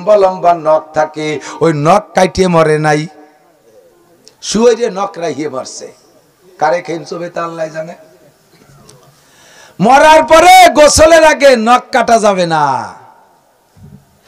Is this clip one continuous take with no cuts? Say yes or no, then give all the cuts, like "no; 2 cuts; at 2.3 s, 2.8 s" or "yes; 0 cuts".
yes; 0 cuts